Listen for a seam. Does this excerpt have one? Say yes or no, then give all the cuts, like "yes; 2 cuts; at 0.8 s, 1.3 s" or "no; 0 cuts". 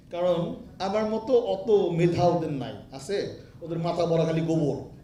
no; 0 cuts